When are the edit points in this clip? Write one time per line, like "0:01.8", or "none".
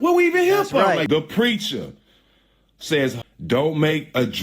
0:01.0
0:03.2